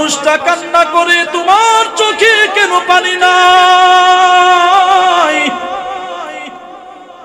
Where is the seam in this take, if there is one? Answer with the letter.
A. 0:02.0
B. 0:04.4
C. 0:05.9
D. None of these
D